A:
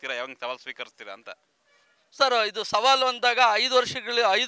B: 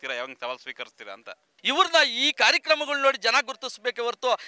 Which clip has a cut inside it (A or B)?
B